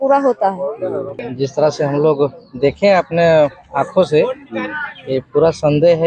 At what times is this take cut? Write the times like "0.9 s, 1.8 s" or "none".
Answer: 1.3 s